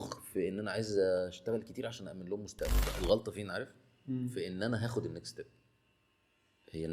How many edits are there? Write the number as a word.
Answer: one